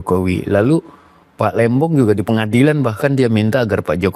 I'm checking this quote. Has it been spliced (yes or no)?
no